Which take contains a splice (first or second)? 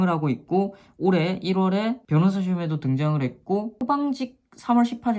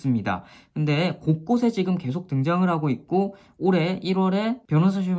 first